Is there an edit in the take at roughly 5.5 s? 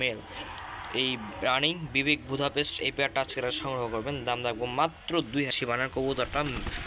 yes; 1 cut; at 5.5 s

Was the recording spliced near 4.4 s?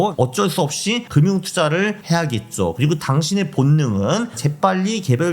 no; 2 cuts; at 1.0 s, 2.0 s

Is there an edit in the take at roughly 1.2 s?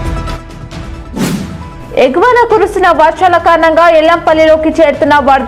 yes; 1 cut; at 1.2 s

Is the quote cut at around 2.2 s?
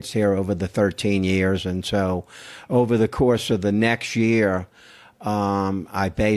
no; 0 cuts

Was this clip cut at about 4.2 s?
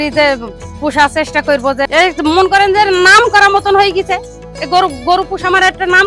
no; 0 cuts

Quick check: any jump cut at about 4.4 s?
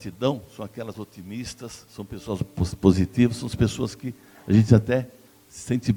no; 0 cuts

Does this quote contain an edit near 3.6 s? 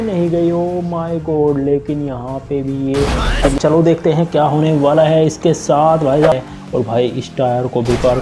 yes; 2 cuts; at 3.6 s, 6.3 s

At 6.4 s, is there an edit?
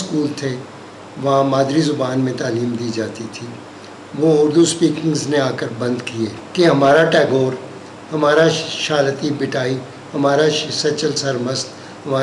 yes; 1 cut; at 6.4 s

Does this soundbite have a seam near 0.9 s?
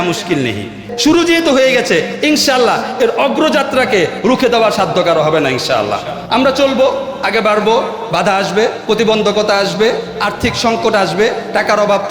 yes; 1 cut; at 0.9 s

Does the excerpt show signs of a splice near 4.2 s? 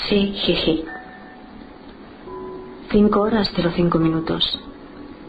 no; 0 cuts

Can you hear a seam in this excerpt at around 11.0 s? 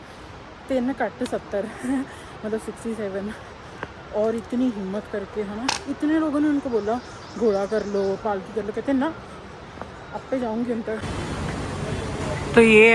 yes; 1 cut; at 11.0 s

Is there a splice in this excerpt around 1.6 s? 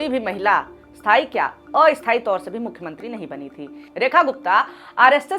no; 1 cut; at 3.8 s

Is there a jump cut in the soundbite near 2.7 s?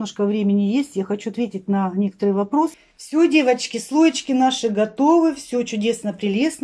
yes; 1 cut; at 2.7 s

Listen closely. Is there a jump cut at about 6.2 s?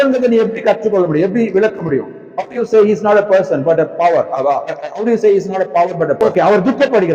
yes; 1 cut; at 6.2 s

